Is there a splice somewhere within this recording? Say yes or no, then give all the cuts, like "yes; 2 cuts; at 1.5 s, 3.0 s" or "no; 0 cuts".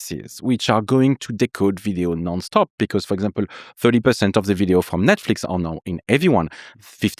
no; 0 cuts